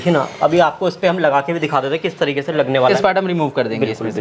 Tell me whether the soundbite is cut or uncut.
cut